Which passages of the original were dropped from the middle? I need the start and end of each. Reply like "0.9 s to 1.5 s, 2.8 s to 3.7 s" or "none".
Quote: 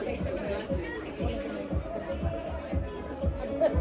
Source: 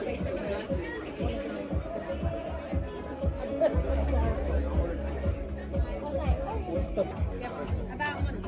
none